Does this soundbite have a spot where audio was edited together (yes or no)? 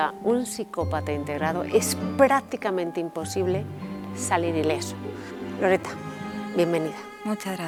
no